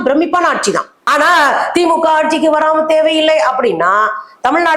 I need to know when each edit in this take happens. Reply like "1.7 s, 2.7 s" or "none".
0.9 s